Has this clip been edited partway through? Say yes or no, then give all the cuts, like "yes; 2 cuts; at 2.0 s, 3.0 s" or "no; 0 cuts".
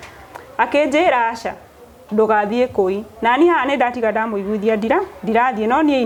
no; 0 cuts